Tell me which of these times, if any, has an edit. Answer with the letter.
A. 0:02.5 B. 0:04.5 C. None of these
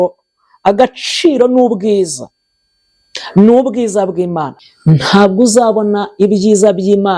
B